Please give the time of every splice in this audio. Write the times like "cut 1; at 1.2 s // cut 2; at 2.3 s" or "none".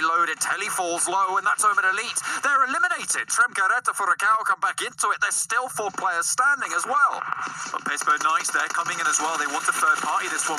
none